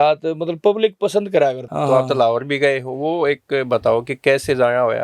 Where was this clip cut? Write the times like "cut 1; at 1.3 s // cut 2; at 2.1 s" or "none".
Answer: cut 1; at 1.6 s